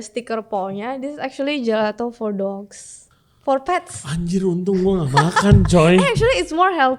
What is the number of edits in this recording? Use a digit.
0